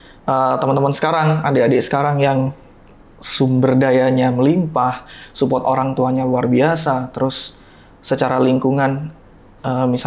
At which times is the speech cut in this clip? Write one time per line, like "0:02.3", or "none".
none